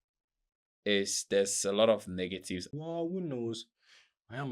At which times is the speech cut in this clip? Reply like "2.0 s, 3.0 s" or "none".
2.7 s